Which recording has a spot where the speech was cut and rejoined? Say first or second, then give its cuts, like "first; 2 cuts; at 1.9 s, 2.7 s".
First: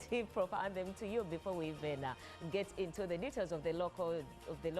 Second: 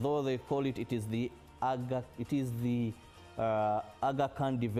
first; 1 cut; at 1.7 s